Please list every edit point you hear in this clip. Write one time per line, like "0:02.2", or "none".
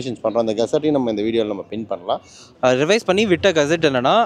0:02.5